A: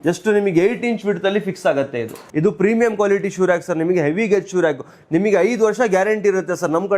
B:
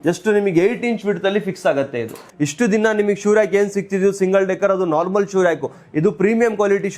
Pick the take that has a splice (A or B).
A